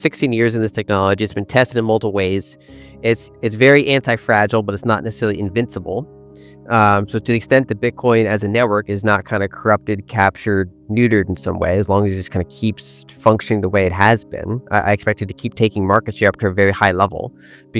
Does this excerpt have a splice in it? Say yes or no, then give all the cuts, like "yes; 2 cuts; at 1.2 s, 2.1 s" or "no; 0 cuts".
no; 0 cuts